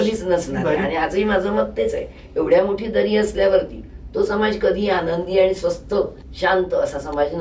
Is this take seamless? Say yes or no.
no